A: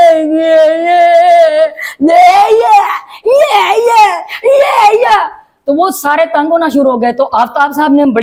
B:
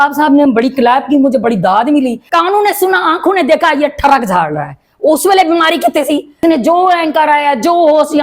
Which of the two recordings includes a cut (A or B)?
B